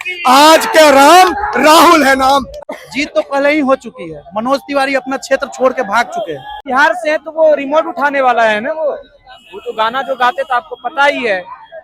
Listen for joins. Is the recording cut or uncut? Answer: cut